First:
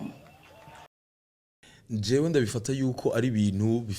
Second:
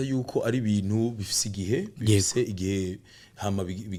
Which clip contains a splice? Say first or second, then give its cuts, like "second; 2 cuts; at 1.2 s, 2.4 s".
first; 1 cut; at 1.2 s